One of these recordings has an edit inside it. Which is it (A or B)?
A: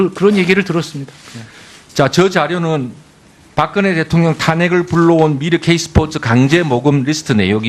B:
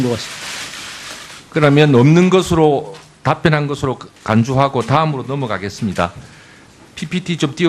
B